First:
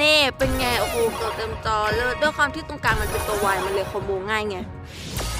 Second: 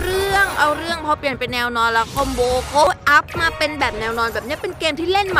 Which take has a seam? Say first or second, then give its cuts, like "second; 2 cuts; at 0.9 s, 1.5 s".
second; 1 cut; at 2.9 s